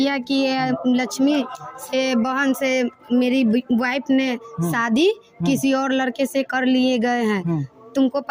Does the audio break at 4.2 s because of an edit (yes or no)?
no